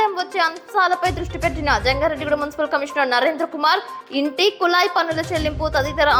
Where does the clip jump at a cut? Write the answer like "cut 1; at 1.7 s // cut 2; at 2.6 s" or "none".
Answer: none